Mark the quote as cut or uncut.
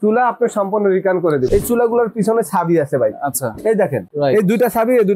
cut